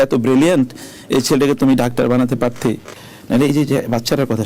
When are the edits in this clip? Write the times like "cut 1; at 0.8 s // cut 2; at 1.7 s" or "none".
cut 1; at 2.9 s